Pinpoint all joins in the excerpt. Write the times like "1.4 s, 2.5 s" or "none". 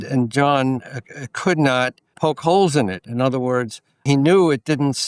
2.1 s, 3.9 s